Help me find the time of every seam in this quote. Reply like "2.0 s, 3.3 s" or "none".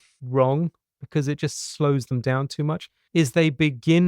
2.9 s